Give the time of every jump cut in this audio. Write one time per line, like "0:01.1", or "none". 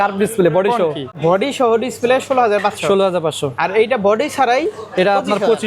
0:01.2